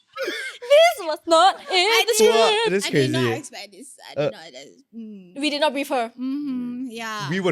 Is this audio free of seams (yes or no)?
yes